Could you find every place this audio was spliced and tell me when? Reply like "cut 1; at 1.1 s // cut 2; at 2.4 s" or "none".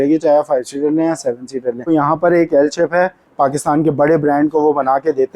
cut 1; at 1.9 s // cut 2; at 3.3 s